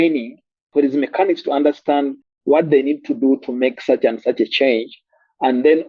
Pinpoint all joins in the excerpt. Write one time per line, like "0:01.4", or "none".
none

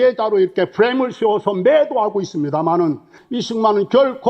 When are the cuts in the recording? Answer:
0:03.1

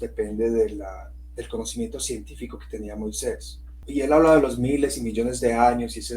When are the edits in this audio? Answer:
0:03.8

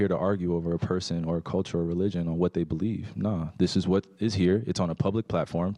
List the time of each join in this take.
none

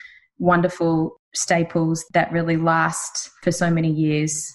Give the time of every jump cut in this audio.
0:01.1
0:02.0
0:03.3

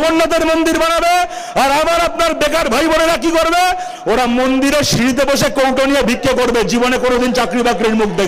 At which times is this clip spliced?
none

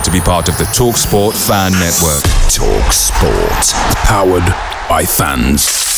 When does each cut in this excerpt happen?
none

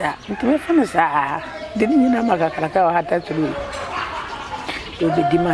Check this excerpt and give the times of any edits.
none

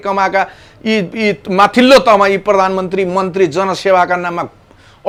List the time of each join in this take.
none

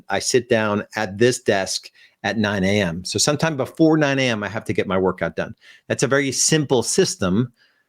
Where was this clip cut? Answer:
none

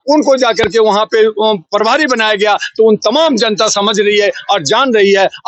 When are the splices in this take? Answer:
none

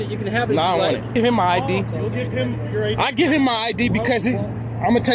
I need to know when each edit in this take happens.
0:01.1

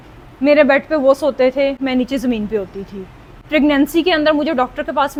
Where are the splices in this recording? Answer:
none

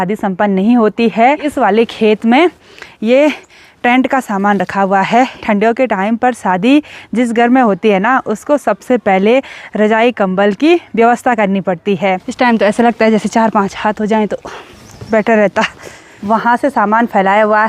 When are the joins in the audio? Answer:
0:01.5
0:05.4
0:12.3
0:16.1

